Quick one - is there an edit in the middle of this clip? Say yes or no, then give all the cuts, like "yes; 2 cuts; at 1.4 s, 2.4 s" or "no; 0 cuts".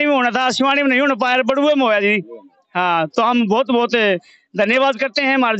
no; 0 cuts